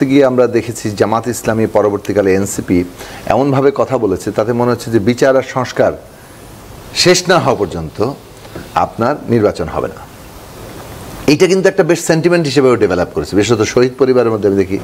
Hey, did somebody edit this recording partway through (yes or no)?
no